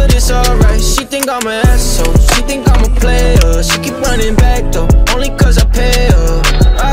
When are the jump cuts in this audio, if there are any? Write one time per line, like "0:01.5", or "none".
0:00.9